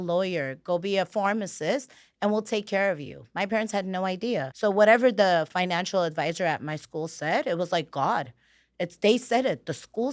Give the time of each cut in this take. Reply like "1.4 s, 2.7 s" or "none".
4.5 s